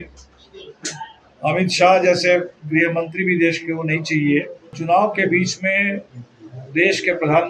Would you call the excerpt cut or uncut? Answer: cut